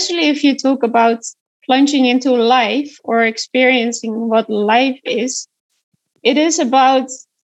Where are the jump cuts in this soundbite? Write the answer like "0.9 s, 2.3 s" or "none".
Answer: 1.3 s, 6.0 s